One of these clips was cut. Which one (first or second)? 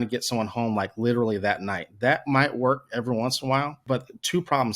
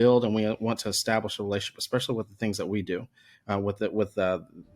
first